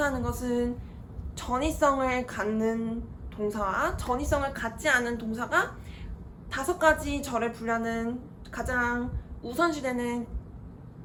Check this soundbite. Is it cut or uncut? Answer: uncut